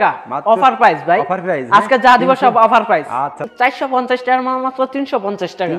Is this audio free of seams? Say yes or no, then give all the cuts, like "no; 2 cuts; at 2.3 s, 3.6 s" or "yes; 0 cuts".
no; 1 cut; at 3.5 s